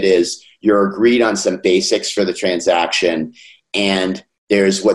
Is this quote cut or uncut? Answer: uncut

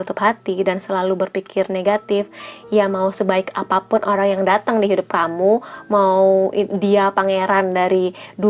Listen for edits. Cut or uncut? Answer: uncut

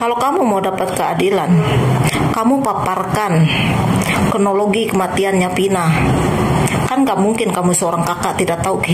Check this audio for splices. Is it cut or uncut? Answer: uncut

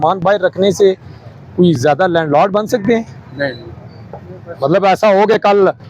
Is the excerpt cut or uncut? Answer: uncut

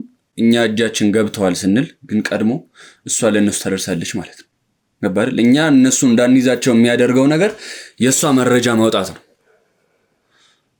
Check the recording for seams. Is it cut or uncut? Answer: uncut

